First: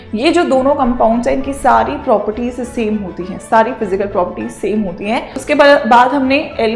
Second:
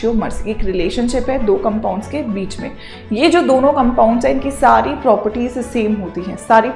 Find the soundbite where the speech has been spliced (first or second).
first